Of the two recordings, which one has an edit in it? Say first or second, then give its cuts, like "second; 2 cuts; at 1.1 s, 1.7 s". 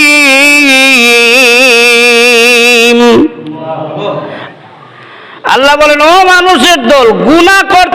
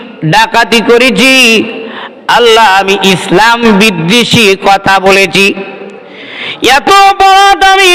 first; 1 cut; at 4.4 s